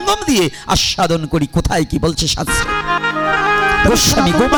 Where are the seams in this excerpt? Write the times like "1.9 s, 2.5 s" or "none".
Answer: none